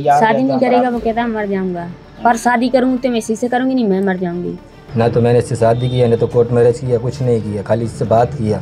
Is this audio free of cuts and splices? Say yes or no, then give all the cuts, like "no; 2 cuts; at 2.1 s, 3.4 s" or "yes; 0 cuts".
no; 1 cut; at 4.8 s